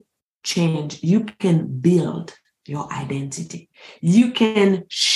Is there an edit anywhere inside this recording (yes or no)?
no